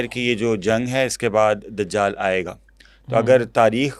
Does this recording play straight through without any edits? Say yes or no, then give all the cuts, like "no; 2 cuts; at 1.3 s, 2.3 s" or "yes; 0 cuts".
yes; 0 cuts